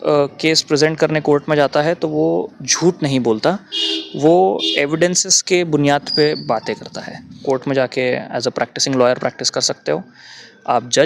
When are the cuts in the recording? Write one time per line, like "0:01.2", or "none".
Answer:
0:07.4